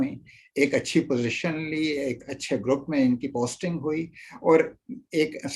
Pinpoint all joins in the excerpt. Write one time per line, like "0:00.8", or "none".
none